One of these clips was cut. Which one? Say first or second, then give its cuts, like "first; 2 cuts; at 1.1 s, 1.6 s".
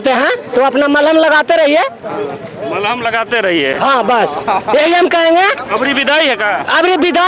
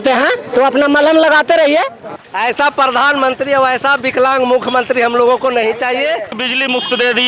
second; 2 cuts; at 2.1 s, 6.3 s